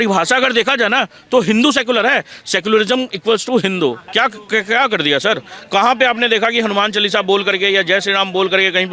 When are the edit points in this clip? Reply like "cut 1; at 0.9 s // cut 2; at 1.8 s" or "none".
cut 1; at 4.0 s